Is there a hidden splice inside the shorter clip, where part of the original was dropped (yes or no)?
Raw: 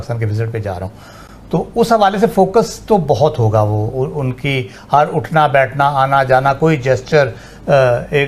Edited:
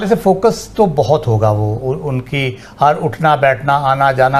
no